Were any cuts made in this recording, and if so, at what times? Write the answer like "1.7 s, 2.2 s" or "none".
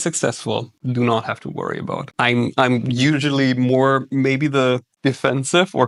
none